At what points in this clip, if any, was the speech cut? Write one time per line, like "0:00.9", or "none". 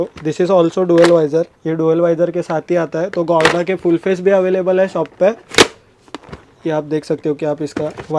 0:01.6